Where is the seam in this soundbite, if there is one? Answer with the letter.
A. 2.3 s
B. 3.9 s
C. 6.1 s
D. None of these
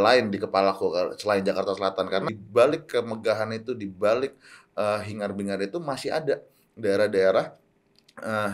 A